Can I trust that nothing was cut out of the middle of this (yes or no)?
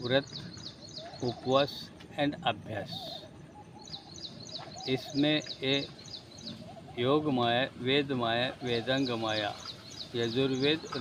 yes